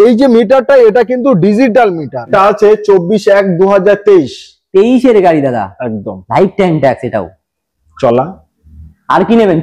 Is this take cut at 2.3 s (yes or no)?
yes